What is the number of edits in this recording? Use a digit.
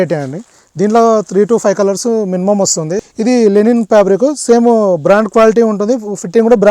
1